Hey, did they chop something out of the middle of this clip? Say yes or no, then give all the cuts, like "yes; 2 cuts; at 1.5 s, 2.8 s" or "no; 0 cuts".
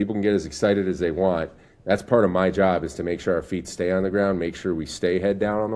no; 0 cuts